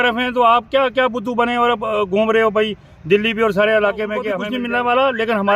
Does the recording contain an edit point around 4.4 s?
yes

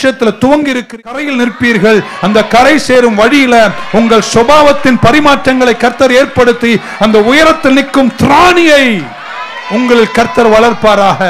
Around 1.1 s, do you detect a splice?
yes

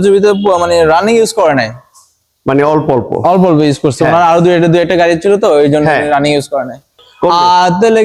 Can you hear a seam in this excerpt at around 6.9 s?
yes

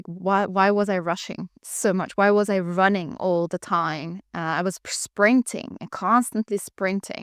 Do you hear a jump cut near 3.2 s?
no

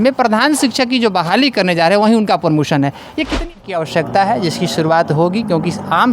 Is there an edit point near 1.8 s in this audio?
no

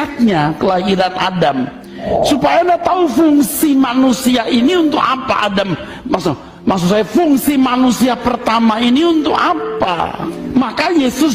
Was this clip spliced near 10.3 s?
yes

